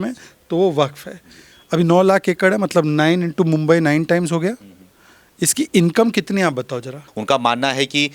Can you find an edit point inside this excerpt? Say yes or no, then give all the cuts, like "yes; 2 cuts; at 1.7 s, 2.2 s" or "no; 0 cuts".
yes; 1 cut; at 7.1 s